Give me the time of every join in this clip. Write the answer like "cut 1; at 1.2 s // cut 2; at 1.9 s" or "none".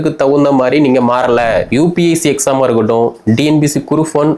cut 1; at 1.7 s